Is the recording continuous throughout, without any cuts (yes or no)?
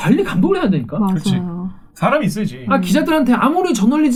yes